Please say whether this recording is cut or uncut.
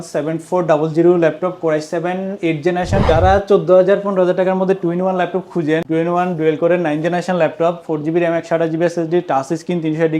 cut